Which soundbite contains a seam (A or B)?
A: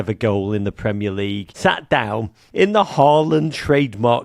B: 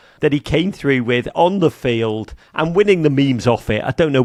A